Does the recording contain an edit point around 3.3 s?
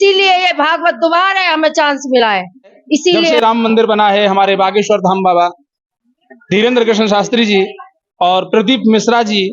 yes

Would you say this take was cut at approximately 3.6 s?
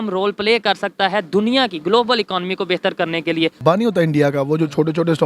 yes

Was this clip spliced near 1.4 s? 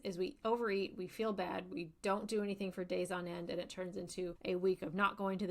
no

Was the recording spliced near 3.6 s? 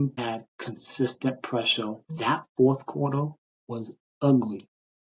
no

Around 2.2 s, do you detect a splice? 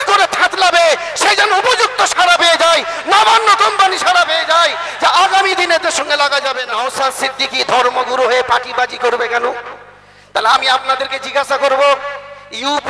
no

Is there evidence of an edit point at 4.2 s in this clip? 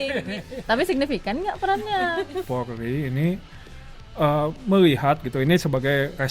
no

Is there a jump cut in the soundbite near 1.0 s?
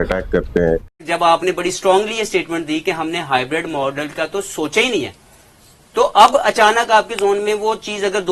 yes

